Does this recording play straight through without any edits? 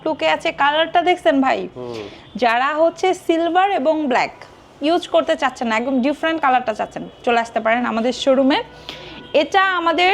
yes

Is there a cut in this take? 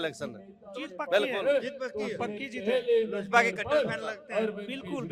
no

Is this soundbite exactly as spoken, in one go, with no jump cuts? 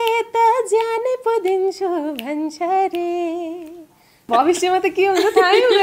no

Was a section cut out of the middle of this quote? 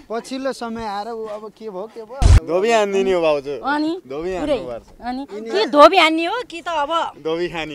yes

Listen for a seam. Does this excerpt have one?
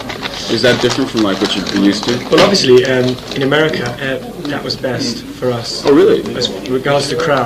yes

